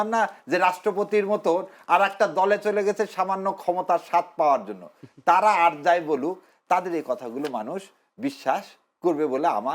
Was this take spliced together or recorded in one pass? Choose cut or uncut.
uncut